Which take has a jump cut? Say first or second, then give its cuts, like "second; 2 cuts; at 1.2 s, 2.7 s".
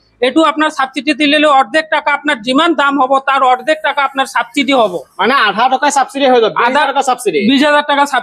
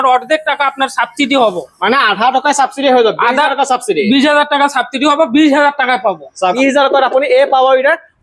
second; 1 cut; at 6.5 s